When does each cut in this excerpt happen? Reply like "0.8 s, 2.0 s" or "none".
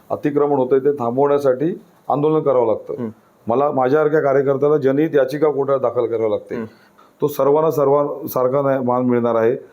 6.9 s

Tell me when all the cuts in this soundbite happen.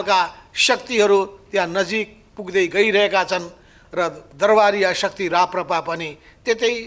none

